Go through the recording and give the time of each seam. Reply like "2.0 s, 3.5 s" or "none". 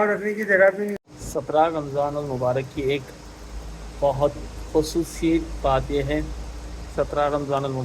0.9 s